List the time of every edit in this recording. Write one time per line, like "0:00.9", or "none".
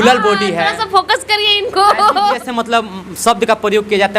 0:02.4